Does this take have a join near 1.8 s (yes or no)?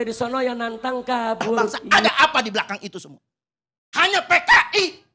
yes